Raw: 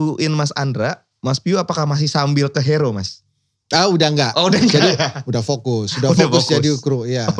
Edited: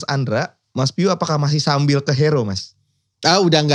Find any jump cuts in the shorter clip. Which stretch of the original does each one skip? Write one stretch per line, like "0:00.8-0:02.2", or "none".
none